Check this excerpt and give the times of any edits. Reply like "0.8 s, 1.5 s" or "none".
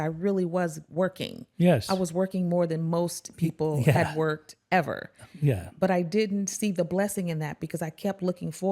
none